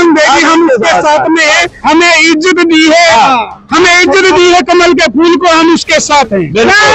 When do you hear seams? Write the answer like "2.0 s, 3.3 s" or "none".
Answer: none

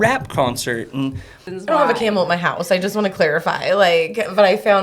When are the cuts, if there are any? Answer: 1.5 s

